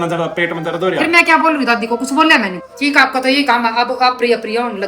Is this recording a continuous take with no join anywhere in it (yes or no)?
no